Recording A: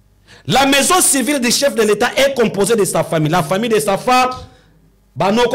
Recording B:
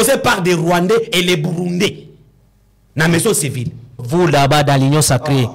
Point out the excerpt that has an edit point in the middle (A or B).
B